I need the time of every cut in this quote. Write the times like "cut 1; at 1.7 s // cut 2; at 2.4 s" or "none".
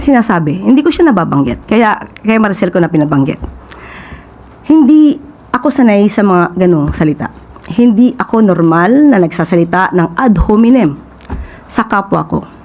none